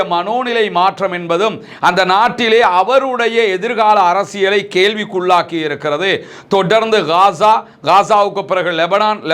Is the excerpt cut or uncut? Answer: uncut